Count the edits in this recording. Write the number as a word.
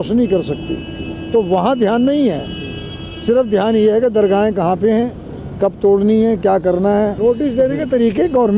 one